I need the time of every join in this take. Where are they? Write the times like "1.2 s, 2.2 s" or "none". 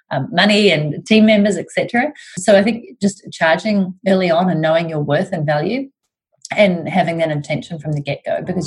2.4 s